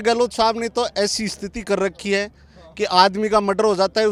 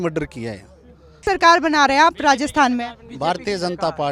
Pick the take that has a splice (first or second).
second